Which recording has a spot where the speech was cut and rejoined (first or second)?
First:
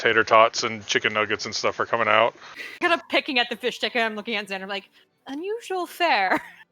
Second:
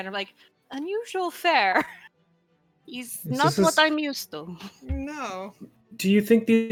first